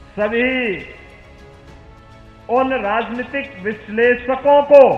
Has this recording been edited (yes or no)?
yes